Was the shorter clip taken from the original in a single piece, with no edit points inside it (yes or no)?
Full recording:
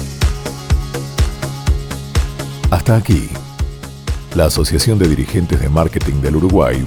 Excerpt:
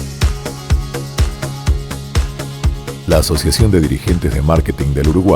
no